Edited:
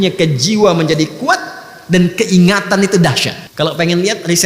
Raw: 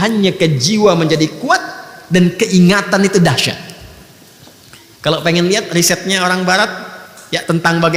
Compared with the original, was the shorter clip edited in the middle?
yes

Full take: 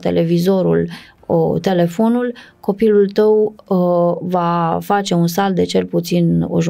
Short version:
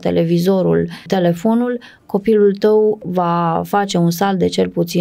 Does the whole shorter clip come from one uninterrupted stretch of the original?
no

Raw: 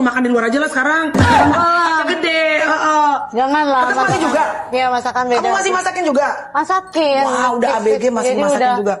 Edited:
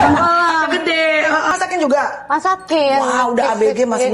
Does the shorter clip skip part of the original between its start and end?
yes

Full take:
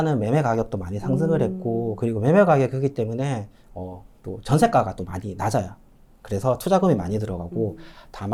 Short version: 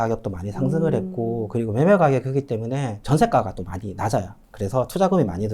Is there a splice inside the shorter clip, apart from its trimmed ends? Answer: yes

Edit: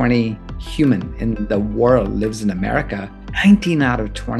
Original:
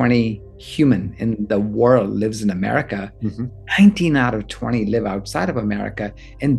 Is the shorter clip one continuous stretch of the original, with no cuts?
no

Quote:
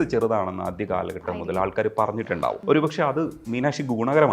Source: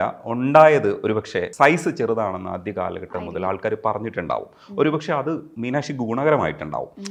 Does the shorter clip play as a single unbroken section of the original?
no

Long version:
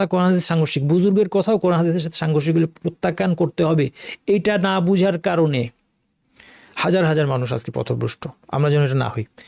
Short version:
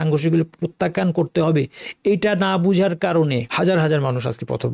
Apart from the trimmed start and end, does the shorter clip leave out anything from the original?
yes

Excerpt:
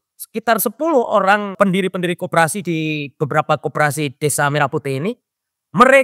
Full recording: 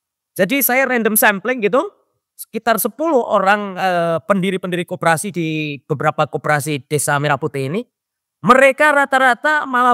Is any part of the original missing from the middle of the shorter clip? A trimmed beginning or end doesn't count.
yes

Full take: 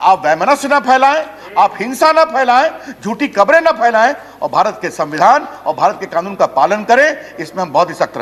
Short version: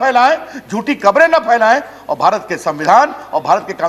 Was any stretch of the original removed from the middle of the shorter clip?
no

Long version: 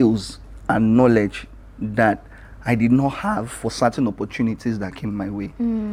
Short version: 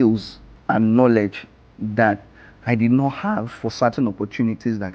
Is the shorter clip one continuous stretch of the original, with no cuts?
yes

